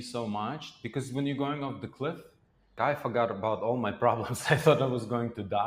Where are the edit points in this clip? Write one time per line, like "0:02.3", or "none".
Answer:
0:02.8